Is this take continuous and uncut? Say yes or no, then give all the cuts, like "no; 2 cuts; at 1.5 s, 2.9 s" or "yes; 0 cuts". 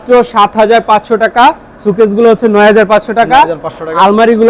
yes; 0 cuts